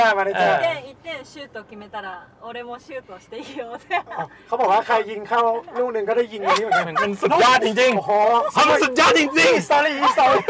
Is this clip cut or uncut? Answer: cut